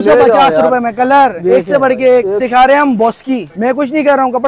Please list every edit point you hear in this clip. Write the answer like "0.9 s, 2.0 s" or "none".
2.4 s, 3.5 s